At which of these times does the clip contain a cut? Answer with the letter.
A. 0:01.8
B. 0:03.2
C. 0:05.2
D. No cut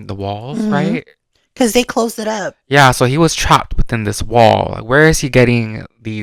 D